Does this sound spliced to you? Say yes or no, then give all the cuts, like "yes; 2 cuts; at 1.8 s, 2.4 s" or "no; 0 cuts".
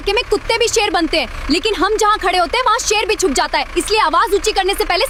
no; 0 cuts